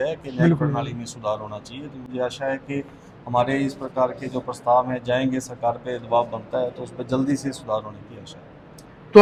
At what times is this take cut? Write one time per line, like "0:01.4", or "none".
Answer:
none